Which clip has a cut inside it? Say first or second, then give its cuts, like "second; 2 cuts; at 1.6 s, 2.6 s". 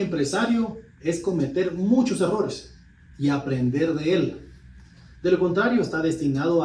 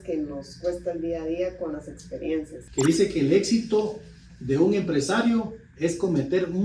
second; 1 cut; at 2.6 s